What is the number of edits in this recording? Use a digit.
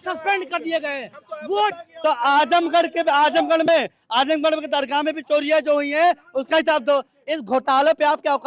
1